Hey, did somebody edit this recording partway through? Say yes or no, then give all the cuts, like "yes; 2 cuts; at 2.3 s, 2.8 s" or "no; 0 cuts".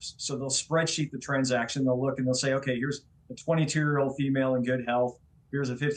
no; 0 cuts